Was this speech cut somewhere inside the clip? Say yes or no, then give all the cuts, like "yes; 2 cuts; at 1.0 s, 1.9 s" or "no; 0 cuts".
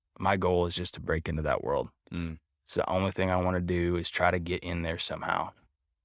no; 0 cuts